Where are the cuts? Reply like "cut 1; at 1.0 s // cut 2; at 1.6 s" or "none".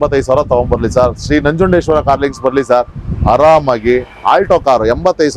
none